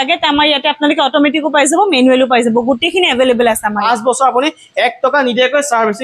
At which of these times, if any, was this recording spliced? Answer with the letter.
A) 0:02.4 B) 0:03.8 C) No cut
B